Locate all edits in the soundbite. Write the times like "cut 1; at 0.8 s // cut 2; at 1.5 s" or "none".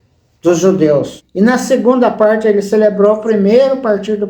cut 1; at 1.2 s